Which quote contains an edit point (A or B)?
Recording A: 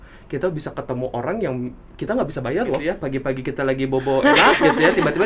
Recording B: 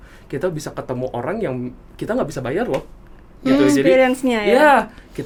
A